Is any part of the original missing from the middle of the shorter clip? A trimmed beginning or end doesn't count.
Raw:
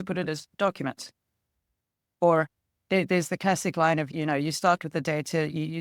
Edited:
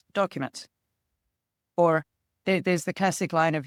no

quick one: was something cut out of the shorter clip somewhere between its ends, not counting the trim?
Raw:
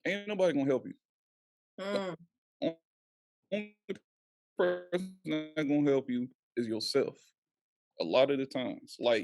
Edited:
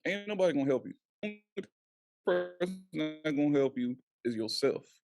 yes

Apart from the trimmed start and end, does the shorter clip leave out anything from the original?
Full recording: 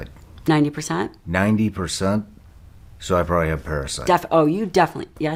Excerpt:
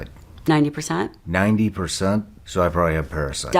yes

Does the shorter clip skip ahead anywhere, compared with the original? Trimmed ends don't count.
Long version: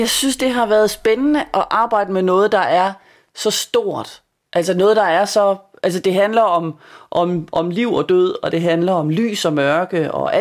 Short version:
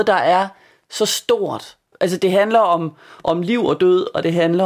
yes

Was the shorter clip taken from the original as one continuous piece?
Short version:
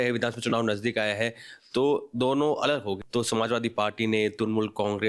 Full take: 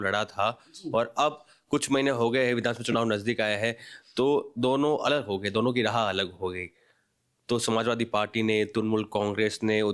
no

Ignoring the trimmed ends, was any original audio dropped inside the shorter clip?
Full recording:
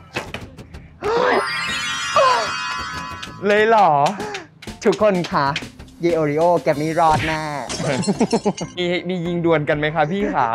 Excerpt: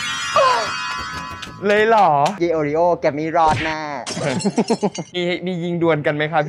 yes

